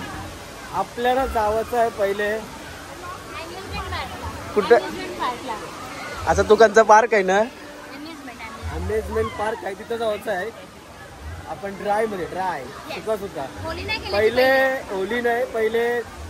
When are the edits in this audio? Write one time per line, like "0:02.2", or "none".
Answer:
none